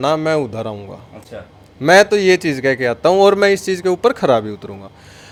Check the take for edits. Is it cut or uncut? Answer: uncut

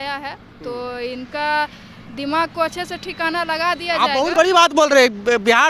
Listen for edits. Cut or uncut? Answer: uncut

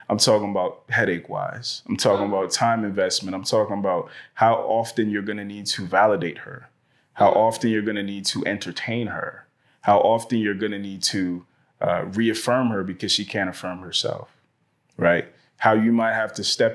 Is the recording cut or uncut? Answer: uncut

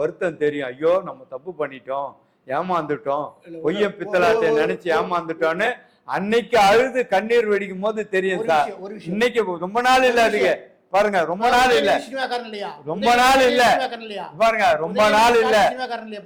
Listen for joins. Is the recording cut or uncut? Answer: uncut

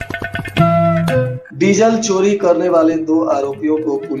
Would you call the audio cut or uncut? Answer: cut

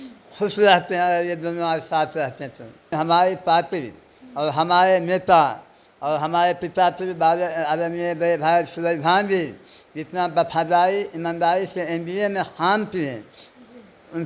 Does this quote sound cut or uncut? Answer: cut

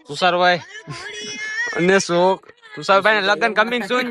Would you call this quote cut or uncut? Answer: uncut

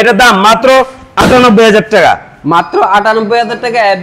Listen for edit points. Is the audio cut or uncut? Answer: uncut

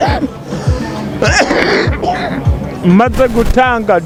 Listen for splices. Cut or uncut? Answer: uncut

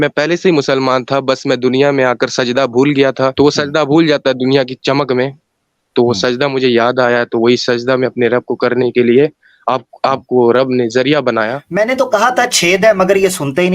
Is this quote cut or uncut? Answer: cut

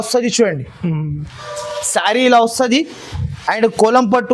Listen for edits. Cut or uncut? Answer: uncut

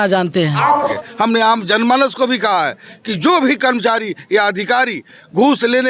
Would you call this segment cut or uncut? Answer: cut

